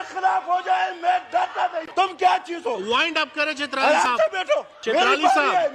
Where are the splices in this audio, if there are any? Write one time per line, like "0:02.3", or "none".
0:01.8
0:04.7